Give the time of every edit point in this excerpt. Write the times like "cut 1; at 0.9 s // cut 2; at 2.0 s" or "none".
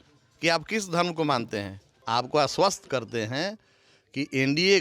cut 1; at 1.9 s